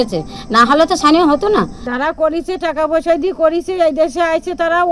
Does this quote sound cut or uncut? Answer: cut